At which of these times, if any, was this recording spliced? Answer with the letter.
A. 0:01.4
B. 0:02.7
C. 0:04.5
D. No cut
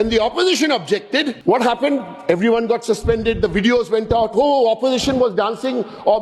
A